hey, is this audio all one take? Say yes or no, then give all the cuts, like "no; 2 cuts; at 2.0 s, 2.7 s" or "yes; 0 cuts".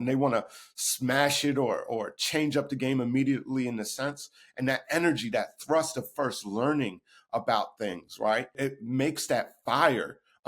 no; 1 cut; at 8.6 s